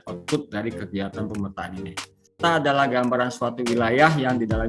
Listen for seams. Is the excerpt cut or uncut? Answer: cut